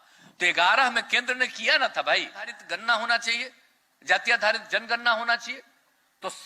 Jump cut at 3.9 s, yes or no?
no